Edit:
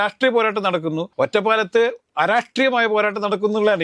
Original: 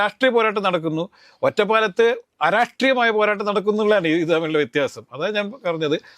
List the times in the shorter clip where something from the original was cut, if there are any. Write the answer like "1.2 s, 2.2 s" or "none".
1.1 s